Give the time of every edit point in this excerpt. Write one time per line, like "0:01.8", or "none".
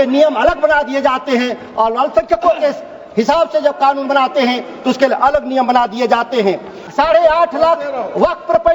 0:06.8